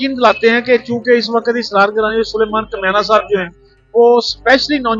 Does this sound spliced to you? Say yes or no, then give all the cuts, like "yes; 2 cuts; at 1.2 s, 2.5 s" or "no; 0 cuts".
no; 0 cuts